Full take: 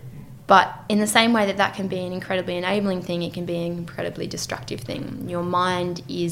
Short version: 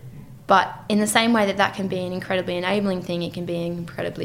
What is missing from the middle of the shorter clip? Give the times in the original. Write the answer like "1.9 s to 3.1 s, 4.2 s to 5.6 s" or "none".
none